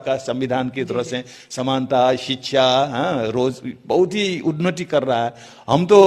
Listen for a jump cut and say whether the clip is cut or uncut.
uncut